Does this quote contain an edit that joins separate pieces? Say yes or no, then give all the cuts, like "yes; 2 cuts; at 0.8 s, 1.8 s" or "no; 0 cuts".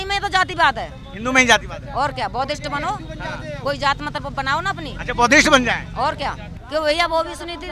no; 0 cuts